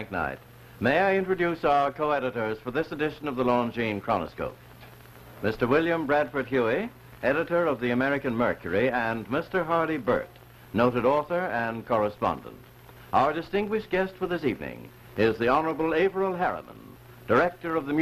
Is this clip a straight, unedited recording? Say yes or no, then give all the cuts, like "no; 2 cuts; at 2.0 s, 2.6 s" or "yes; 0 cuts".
yes; 0 cuts